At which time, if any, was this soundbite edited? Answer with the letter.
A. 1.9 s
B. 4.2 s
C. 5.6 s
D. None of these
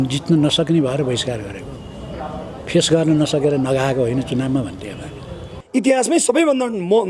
C